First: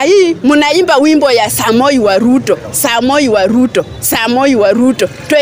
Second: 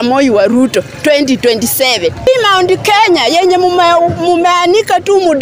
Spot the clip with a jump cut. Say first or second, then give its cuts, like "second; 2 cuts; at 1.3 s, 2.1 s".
second; 1 cut; at 2.3 s